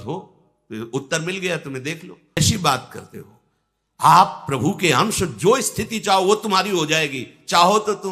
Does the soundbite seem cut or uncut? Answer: cut